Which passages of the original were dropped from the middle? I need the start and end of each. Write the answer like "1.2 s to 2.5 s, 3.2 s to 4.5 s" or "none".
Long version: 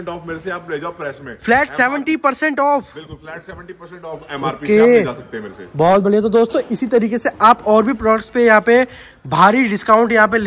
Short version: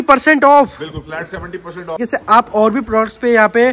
4.1 s to 7.1 s